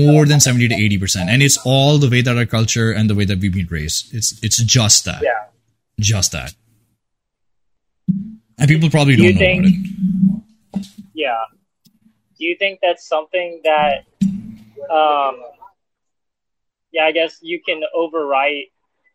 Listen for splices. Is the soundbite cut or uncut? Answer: uncut